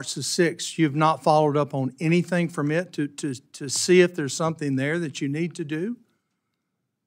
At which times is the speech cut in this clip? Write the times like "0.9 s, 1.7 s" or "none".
none